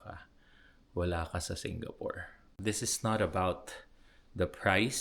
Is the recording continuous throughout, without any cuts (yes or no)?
no